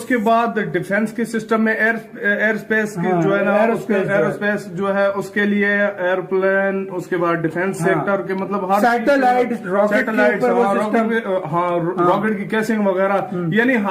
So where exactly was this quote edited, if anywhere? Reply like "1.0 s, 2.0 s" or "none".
none